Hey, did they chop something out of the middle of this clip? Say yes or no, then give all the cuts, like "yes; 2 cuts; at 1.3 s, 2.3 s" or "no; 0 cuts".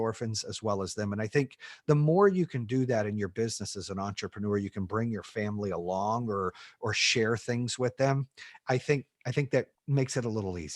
yes; 1 cut; at 9.8 s